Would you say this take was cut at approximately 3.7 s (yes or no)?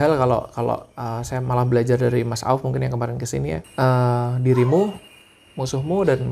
yes